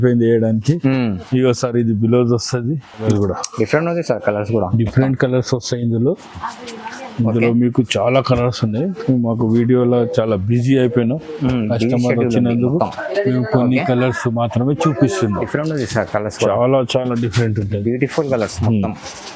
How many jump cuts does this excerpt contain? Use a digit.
2